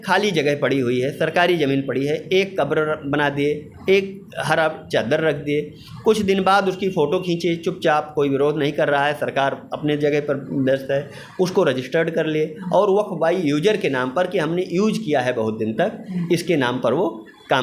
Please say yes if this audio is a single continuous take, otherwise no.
yes